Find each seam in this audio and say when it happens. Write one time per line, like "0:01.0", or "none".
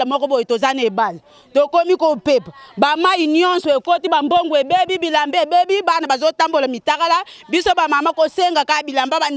none